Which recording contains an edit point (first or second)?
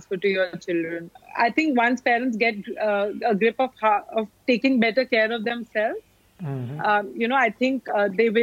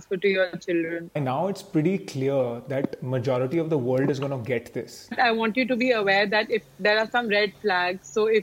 second